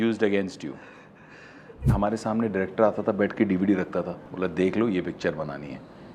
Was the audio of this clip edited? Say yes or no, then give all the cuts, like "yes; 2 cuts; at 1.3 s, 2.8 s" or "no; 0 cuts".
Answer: yes; 2 cuts; at 1.9 s, 4.2 s